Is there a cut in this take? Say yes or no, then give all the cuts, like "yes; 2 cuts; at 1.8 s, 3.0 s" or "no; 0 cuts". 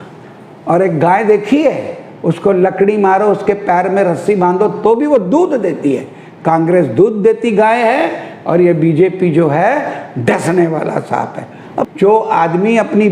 yes; 1 cut; at 11.9 s